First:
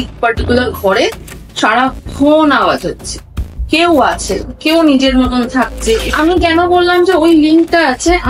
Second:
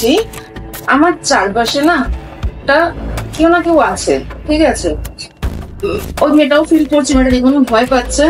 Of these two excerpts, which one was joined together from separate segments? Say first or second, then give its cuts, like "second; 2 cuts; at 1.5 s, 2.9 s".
first; 1 cut; at 6.1 s